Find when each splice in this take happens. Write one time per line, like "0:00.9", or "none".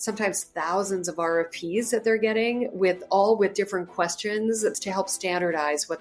0:04.7